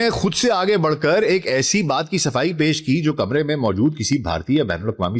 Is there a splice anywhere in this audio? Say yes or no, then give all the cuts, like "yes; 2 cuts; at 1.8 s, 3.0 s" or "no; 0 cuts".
no; 0 cuts